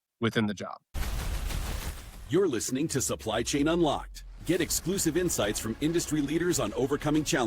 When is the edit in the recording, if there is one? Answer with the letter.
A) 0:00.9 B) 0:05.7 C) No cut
A